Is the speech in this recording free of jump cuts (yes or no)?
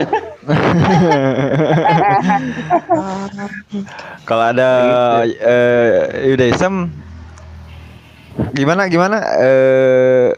yes